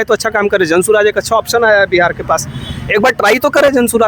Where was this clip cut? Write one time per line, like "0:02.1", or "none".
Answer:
none